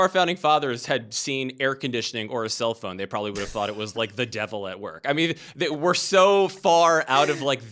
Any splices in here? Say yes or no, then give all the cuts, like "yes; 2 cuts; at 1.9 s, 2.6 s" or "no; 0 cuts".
no; 0 cuts